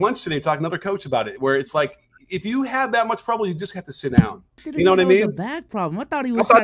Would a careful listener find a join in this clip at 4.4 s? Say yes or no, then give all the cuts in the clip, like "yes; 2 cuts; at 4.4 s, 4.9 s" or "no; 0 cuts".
yes; 1 cut; at 4.4 s